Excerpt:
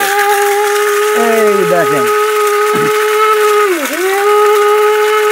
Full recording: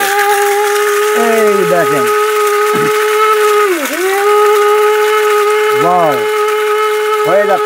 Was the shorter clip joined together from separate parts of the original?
no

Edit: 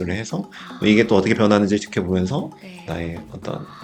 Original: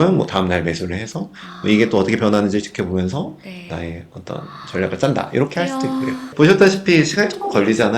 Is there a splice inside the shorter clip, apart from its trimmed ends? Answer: no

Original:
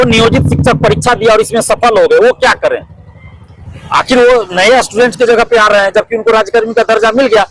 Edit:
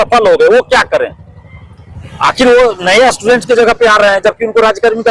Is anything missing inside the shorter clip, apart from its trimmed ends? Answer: no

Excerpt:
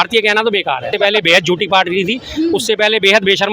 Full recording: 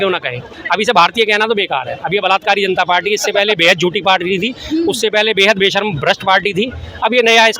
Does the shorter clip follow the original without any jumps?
no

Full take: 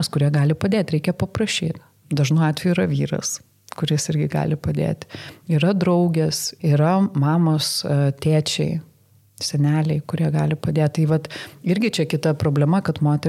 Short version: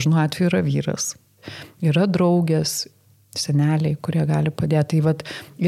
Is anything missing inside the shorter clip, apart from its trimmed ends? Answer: yes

